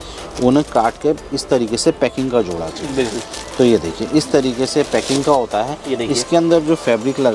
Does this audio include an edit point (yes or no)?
no